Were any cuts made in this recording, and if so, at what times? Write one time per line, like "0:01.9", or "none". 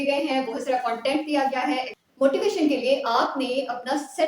0:01.9